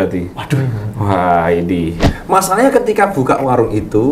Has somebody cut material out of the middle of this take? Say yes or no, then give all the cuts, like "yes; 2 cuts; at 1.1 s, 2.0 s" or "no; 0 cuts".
yes; 1 cut; at 2.1 s